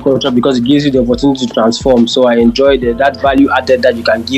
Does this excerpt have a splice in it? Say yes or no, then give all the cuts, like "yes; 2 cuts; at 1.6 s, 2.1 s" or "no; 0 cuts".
no; 0 cuts